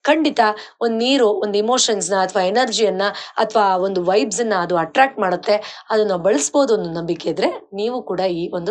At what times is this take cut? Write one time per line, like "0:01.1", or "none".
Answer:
none